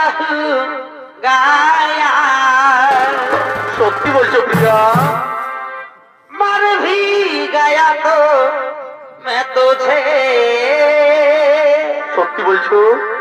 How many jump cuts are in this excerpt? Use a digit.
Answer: 0